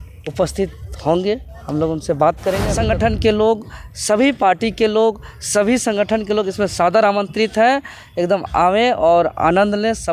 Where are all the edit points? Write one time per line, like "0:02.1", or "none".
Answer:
0:02.7